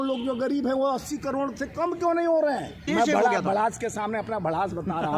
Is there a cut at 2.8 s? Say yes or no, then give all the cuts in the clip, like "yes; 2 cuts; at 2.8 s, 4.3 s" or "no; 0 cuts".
yes; 1 cut; at 2.8 s